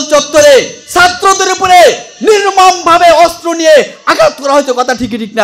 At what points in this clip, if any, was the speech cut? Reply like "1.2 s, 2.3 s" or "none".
none